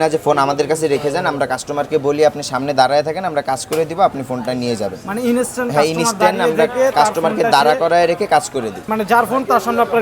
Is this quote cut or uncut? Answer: cut